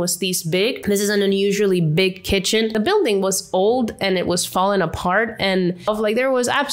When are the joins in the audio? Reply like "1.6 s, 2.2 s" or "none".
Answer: 2.7 s, 5.9 s